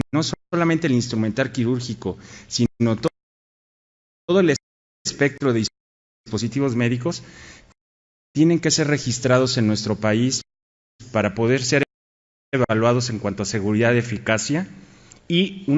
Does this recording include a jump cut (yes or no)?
yes